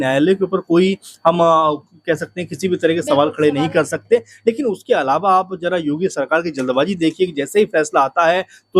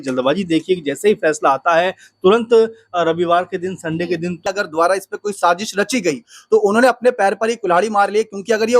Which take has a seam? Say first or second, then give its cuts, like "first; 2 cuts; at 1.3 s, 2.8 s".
second; 1 cut; at 4.4 s